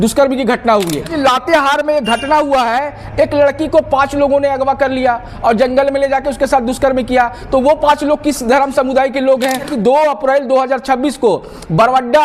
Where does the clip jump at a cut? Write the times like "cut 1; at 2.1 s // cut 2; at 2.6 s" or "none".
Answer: cut 1; at 1.1 s // cut 2; at 9.7 s